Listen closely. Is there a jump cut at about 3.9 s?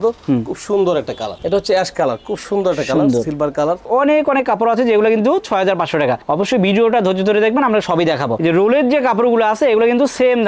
yes; 3 cuts; at 1.3 s, 3.9 s, 8.4 s

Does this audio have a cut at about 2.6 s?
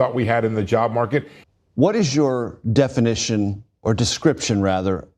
no; 1 cut; at 1.4 s

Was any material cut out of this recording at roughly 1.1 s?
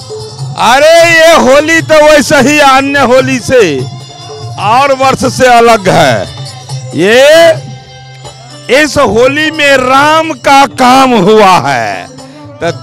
no; 0 cuts

